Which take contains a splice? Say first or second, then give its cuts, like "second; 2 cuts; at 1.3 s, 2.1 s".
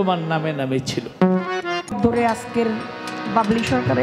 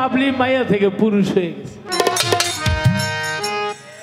first; 1 cut; at 1.9 s